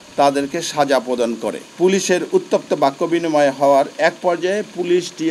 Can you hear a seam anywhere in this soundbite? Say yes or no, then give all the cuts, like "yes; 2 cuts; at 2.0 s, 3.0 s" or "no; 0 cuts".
yes; 1 cut; at 1.6 s